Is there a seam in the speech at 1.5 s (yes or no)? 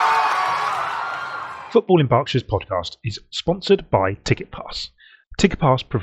yes